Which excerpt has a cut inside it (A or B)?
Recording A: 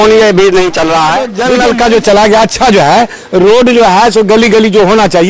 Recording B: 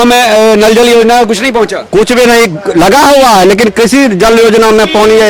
A